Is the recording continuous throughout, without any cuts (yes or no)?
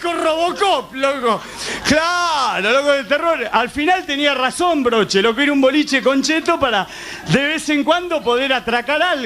no